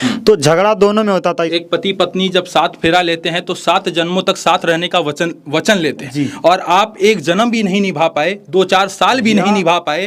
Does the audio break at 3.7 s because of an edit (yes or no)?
no